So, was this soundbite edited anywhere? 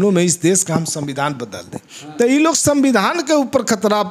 no; 0 cuts

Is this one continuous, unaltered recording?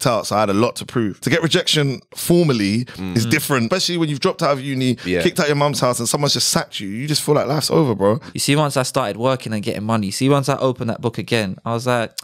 no; 3 cuts; at 1.2 s, 3.7 s, 8.3 s

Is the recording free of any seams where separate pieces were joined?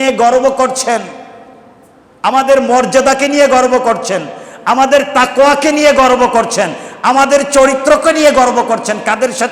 yes; 0 cuts

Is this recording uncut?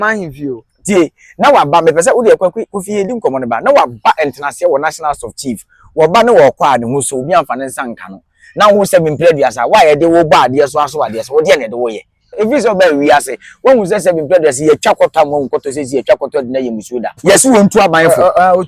no; 2 cuts; at 12.3 s, 17.2 s

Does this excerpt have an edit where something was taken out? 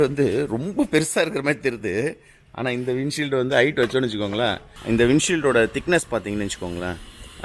yes; 1 cut; at 4.7 s

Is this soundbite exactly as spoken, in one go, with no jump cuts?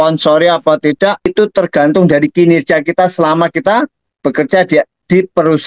no; 1 cut; at 1.3 s

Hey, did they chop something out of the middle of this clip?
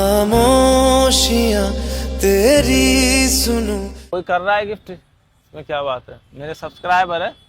no; 0 cuts

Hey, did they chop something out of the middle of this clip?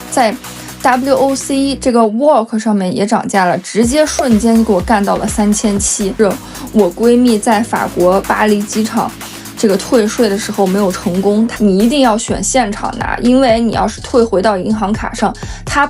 yes; 2 cuts; at 6.1 s, 11.5 s

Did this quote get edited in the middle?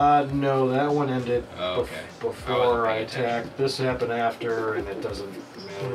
no; 0 cuts

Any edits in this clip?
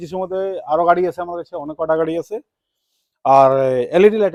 no; 0 cuts

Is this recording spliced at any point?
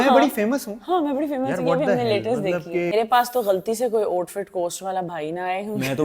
yes; 1 cut; at 2.9 s

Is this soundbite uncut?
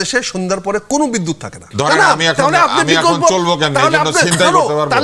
no; 1 cut; at 1.6 s

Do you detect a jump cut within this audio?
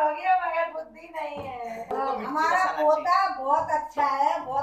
yes; 1 cut; at 1.9 s

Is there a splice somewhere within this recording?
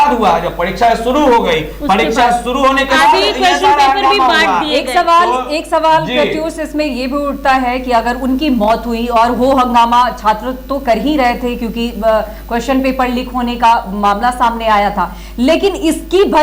no; 0 cuts

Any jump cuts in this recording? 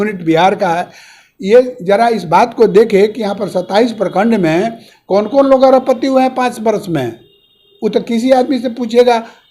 no; 0 cuts

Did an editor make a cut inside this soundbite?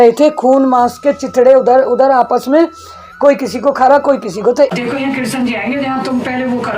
yes; 1 cut; at 4.7 s

